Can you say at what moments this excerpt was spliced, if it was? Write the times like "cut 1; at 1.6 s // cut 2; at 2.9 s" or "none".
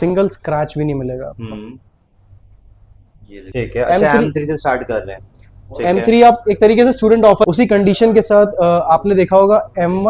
cut 1; at 3.4 s // cut 2; at 7.5 s